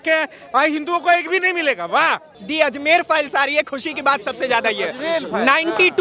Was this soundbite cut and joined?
yes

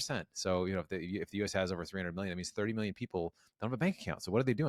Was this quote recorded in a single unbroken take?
yes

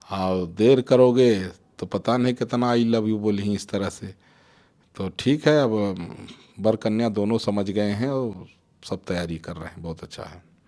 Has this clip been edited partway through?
no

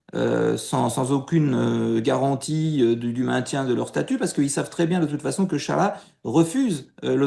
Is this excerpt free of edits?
yes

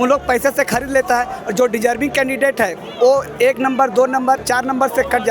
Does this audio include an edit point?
no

